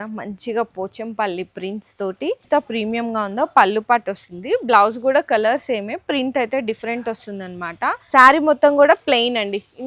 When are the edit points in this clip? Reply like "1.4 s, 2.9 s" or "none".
2.4 s, 8.0 s